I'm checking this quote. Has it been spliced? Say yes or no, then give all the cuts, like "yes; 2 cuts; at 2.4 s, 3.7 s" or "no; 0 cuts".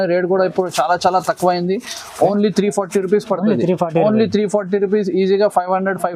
no; 0 cuts